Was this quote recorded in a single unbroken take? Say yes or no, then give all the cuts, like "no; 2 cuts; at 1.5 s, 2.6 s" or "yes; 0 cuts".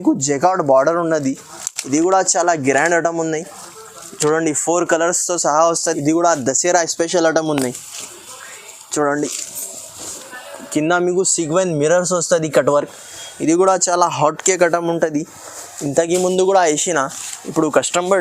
no; 1 cut; at 5.8 s